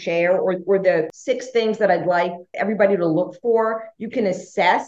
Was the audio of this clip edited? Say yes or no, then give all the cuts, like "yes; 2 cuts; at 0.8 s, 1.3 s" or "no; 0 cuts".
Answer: yes; 2 cuts; at 1.1 s, 2.5 s